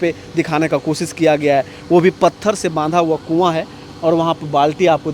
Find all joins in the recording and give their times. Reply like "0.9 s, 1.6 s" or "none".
none